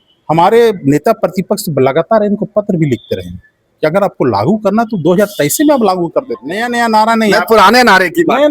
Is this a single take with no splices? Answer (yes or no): no